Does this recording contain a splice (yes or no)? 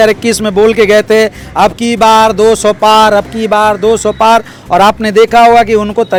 no